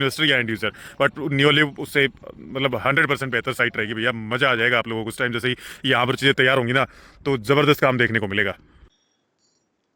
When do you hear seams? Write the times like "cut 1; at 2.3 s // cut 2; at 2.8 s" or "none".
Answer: cut 1; at 8.7 s

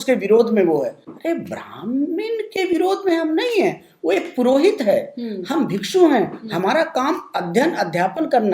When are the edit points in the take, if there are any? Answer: cut 1; at 1.1 s

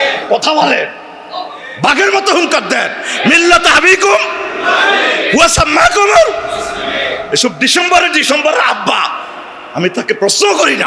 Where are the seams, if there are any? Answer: none

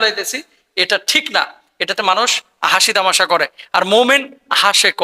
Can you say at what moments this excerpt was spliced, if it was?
none

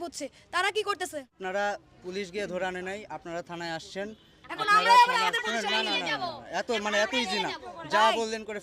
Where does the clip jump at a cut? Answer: cut 1; at 1.3 s

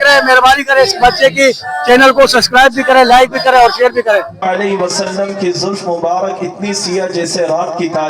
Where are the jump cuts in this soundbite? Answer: cut 1; at 4.3 s

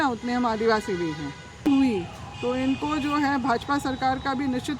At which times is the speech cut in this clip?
cut 1; at 1.7 s

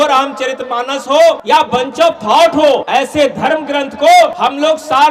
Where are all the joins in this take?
cut 1; at 1.4 s // cut 2; at 2.8 s // cut 3; at 4.3 s

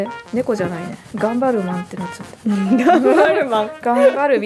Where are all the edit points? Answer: none

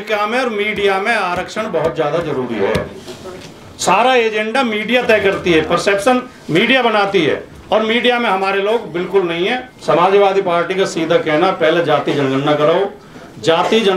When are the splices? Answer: cut 1; at 9.7 s

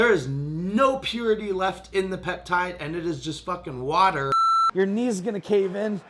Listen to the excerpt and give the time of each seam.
cut 1; at 4.5 s

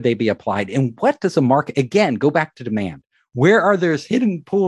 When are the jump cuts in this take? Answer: none

